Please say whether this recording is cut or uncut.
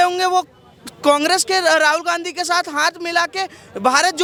uncut